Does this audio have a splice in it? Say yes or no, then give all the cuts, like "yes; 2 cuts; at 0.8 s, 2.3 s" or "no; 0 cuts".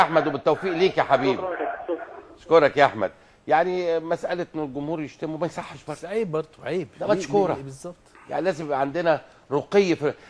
no; 0 cuts